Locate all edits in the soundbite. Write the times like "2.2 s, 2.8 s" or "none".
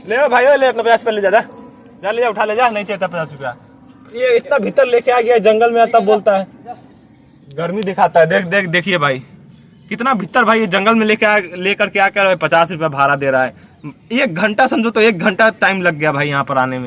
none